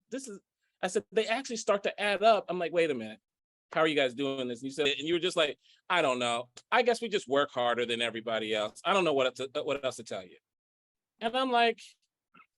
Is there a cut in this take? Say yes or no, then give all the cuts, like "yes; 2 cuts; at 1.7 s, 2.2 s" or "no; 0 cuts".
yes; 1 cut; at 4.8 s